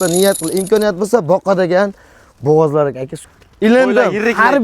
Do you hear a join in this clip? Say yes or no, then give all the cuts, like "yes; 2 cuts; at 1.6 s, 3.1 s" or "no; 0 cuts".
yes; 1 cut; at 3.1 s